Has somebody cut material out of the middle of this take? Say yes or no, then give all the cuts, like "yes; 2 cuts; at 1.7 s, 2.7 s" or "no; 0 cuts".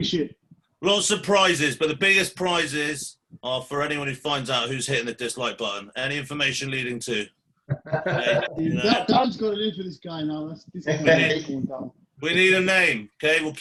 no; 0 cuts